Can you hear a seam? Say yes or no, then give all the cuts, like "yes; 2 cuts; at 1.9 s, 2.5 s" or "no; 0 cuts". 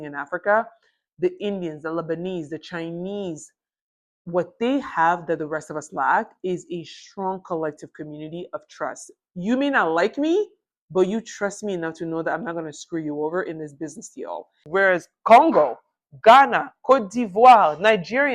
yes; 1 cut; at 14.6 s